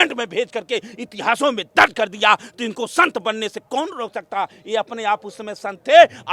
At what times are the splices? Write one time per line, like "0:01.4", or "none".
none